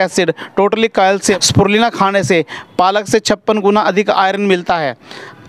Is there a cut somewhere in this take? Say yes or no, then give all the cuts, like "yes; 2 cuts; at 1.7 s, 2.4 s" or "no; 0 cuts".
yes; 1 cut; at 1.4 s